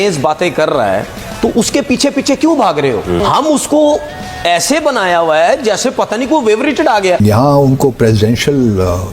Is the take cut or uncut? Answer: cut